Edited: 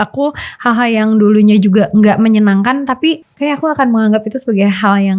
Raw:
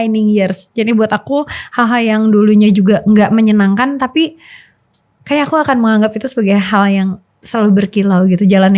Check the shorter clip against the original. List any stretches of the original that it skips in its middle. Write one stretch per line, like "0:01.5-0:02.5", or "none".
0:04.4-0:05.2

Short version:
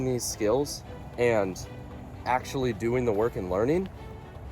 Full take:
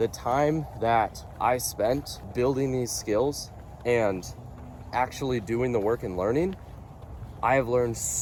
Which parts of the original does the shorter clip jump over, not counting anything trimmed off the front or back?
none

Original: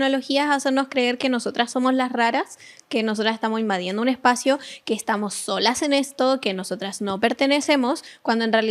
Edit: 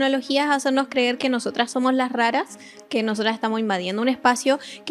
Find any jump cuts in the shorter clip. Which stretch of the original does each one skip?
none

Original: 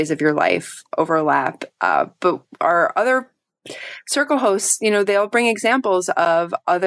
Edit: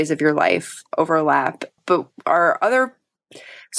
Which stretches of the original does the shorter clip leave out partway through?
0:01.8-0:02.1

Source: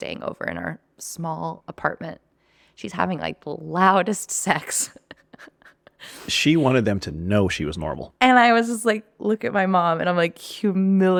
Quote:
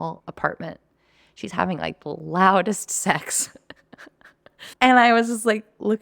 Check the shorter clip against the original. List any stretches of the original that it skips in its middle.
0:06.0-0:08.0

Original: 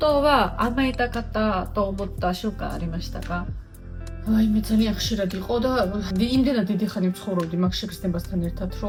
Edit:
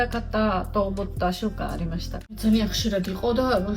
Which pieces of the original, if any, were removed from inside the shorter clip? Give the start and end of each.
0:03.4-0:04.7

